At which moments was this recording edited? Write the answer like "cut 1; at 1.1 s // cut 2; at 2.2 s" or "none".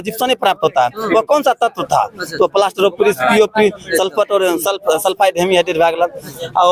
none